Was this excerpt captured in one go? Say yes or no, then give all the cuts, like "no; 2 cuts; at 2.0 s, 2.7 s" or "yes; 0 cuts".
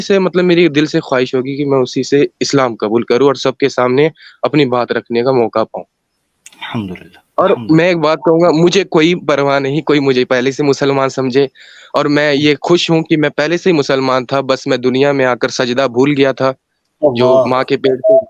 yes; 0 cuts